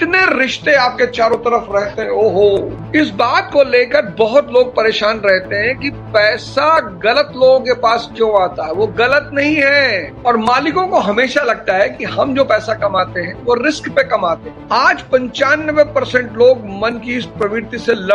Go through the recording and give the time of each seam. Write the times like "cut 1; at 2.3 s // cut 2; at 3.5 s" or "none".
cut 1; at 2.8 s // cut 2; at 10.1 s // cut 3; at 14.5 s

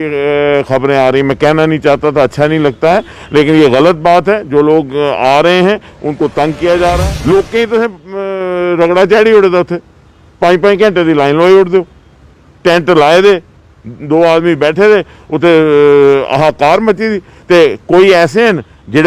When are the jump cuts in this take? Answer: cut 1; at 7.0 s

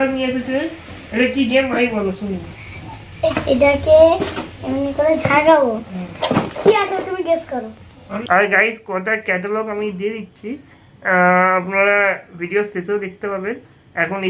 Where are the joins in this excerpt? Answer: cut 1; at 3.3 s // cut 2; at 8.1 s

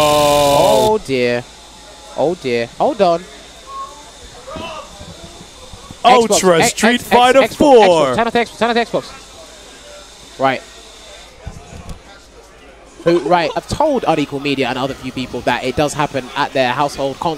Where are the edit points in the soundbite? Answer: none

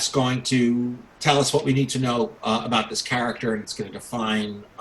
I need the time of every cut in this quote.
cut 1; at 1.1 s

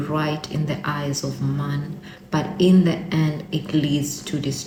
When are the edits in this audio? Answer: none

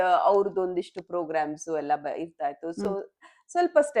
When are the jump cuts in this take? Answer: none

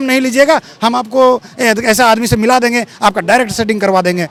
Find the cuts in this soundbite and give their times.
none

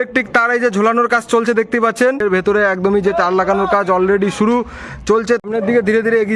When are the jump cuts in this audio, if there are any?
cut 1; at 2.2 s // cut 2; at 5.4 s

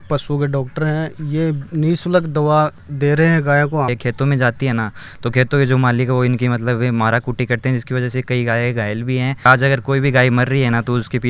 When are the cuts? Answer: cut 1; at 3.9 s // cut 2; at 9.5 s

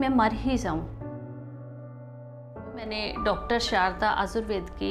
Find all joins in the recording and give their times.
cut 1; at 0.9 s // cut 2; at 3.1 s

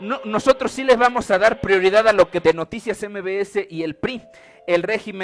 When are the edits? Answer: none

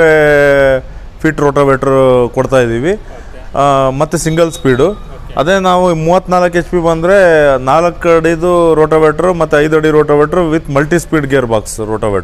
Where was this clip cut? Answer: none

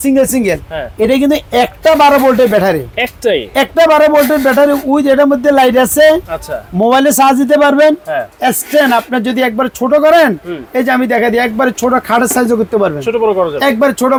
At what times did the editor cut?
none

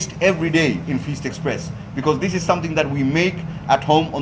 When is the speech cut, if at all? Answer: none

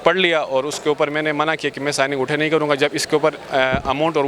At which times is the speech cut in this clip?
none

